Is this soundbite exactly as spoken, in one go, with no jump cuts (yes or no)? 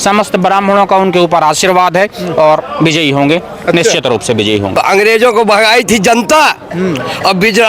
no